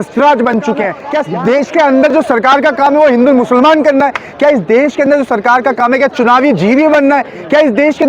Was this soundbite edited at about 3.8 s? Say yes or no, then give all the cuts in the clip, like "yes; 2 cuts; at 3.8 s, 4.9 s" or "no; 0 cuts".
no; 1 cut; at 1.1 s